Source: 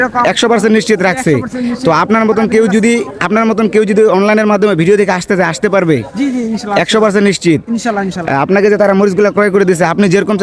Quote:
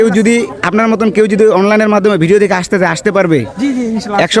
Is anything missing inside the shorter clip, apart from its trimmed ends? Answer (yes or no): no